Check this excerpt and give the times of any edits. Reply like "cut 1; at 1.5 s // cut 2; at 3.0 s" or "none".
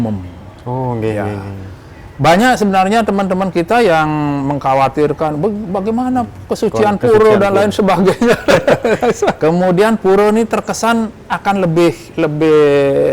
cut 1; at 9.4 s

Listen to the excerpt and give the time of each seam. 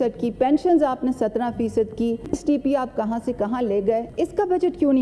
cut 1; at 2.3 s // cut 2; at 4.1 s

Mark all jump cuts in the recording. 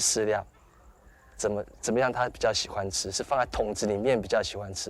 none

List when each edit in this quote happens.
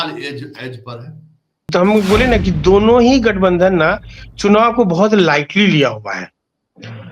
cut 1; at 1.7 s

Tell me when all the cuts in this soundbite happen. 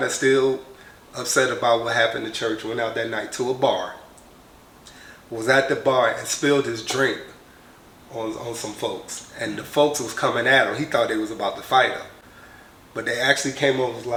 none

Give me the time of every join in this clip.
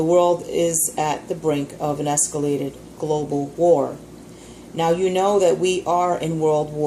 cut 1; at 2.6 s

